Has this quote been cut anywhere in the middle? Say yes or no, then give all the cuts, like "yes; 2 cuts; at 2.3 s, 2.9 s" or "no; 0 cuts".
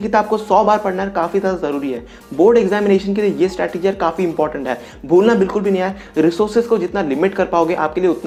no; 0 cuts